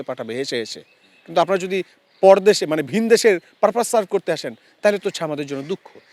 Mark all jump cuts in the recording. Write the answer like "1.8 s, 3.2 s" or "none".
none